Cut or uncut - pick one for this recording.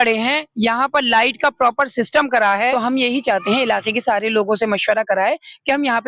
cut